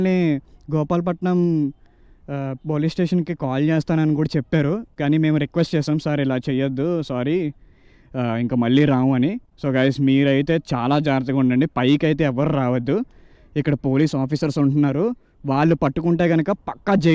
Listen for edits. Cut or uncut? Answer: uncut